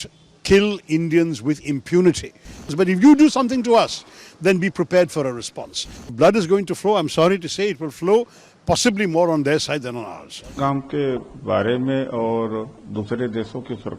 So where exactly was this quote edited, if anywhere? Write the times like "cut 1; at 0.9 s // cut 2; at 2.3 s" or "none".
cut 1; at 2.7 s // cut 2; at 6.1 s // cut 3; at 10.6 s